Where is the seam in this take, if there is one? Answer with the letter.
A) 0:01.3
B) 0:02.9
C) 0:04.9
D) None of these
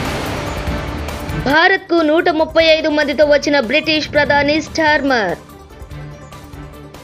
A